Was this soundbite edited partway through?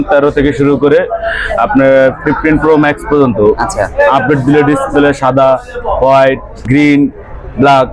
yes; 1 cut; at 6.6 s

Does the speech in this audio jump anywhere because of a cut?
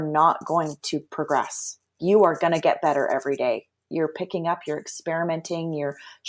yes; 1 cut; at 3.9 s

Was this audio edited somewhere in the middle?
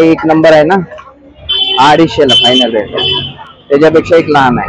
no; 0 cuts

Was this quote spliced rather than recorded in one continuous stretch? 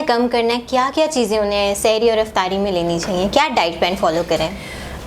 no; 0 cuts

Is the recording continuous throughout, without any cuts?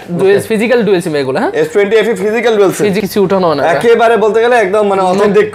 no; 1 cut; at 3.0 s

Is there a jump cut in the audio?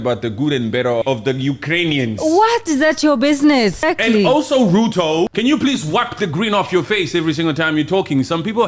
yes; 3 cuts; at 1.0 s, 3.8 s, 5.3 s

